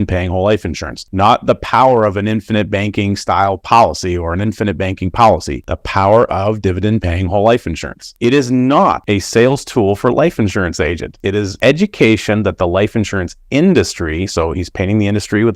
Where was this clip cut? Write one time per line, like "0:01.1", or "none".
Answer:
none